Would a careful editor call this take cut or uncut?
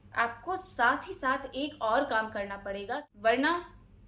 cut